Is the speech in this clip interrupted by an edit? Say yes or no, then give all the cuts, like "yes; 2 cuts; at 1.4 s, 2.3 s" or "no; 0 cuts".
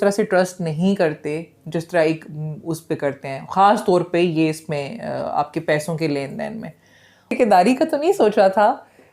yes; 1 cut; at 7.3 s